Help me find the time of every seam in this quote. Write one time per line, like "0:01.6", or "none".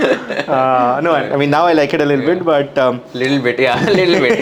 none

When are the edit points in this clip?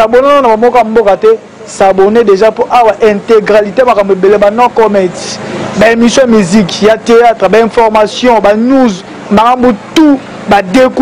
none

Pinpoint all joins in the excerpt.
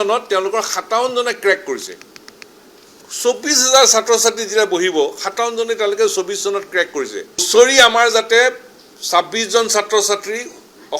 0:07.5

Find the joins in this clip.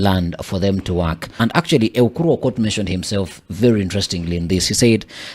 0:01.3

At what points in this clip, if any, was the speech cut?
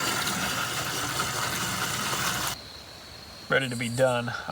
0:02.5

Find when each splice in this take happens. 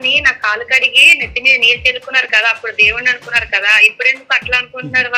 none

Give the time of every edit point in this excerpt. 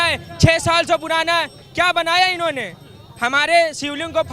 none

